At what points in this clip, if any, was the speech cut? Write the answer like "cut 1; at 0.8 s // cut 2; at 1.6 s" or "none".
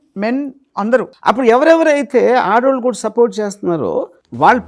cut 1; at 1.1 s